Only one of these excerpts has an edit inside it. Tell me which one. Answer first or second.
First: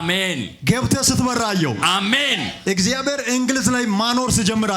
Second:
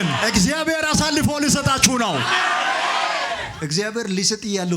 second